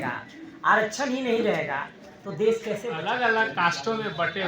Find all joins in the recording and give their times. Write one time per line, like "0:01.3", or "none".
0:03.0